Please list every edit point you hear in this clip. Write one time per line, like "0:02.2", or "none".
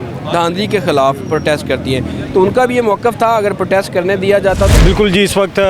0:04.7